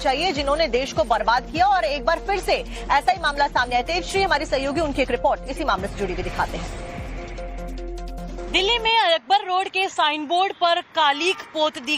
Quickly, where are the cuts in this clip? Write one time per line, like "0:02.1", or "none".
none

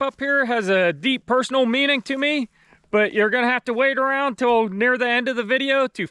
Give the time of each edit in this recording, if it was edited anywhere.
none

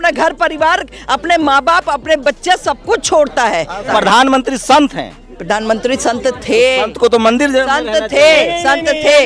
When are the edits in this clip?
0:03.9
0:05.3

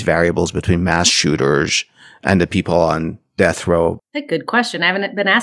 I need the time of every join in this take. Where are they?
0:04.0

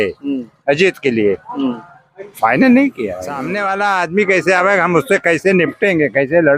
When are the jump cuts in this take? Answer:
0:03.5

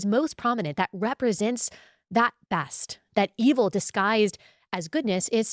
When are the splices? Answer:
none

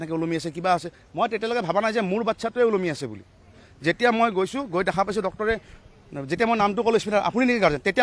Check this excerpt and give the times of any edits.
none

